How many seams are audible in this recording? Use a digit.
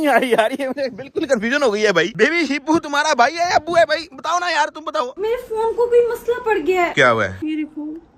3